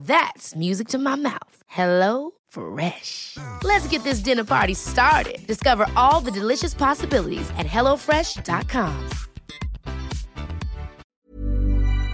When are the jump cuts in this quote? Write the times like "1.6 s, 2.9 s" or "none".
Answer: 11.0 s